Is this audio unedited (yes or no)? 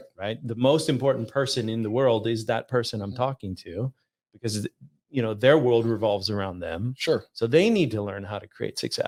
yes